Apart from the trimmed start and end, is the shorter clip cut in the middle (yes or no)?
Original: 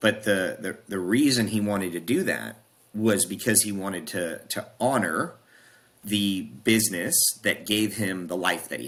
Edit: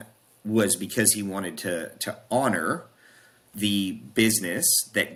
no